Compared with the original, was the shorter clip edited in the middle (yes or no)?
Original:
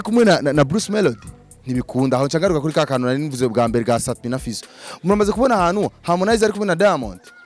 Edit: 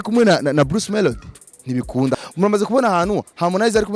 yes